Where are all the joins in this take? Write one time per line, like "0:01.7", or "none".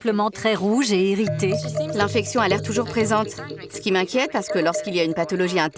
0:01.6